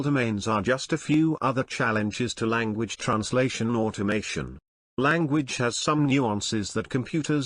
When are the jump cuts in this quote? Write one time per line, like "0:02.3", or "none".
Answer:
none